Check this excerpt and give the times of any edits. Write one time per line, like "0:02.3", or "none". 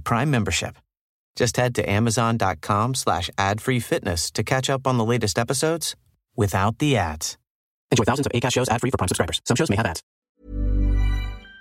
0:10.1